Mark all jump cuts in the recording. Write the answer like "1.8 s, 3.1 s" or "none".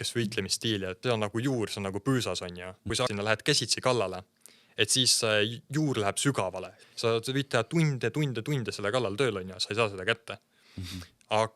1.0 s, 3.1 s, 6.7 s